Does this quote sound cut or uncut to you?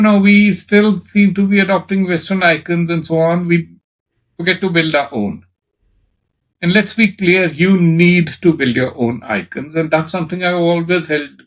uncut